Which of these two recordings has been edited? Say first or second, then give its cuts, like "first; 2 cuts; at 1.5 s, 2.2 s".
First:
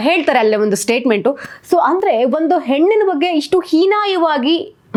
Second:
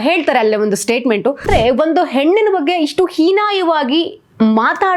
second; 1 cut; at 1.5 s